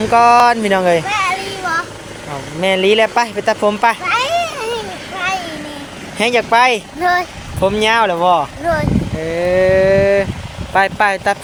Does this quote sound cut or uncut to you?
uncut